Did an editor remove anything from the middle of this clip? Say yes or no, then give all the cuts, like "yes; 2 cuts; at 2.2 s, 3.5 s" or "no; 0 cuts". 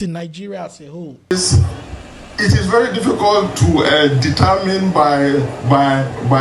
yes; 1 cut; at 1.3 s